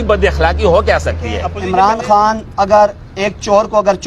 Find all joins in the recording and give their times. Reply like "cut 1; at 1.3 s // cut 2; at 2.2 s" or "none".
cut 1; at 1.5 s